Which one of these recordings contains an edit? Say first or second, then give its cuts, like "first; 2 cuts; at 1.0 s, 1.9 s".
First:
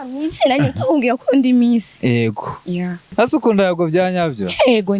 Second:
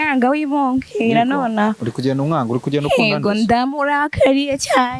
first; 1 cut; at 3.1 s